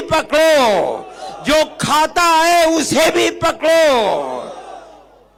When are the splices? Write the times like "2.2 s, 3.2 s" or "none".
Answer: none